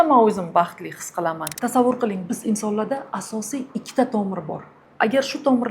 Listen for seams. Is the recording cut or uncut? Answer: cut